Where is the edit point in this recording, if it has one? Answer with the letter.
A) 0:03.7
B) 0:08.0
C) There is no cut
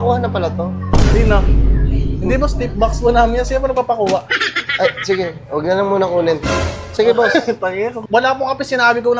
B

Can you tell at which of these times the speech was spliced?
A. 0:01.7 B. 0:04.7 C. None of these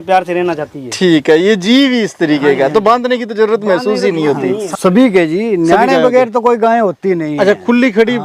B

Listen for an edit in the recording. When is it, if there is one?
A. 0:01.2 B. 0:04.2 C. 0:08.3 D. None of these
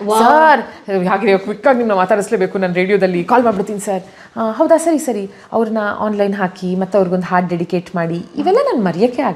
D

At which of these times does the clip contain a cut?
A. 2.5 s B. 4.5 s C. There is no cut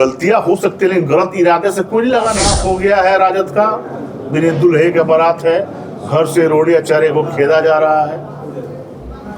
A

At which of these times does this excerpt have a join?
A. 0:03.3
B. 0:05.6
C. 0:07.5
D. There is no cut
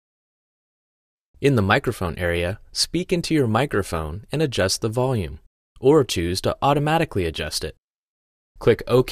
D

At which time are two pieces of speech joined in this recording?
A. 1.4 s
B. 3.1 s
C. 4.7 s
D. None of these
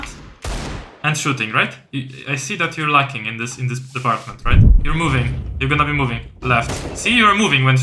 C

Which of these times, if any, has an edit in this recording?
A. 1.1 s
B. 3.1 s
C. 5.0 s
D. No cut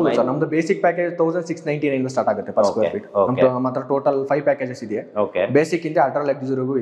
D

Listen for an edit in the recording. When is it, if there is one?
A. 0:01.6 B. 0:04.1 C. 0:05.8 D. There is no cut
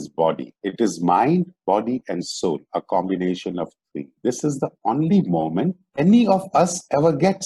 B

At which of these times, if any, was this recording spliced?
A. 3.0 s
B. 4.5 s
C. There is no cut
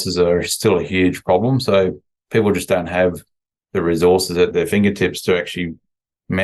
B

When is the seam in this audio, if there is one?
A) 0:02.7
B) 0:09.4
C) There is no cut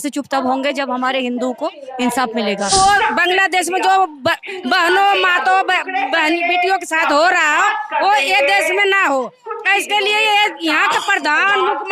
A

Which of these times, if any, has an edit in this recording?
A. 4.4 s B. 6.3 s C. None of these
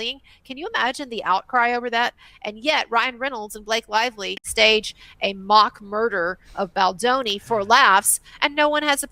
A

